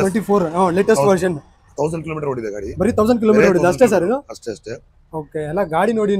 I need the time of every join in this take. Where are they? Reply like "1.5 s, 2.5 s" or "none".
none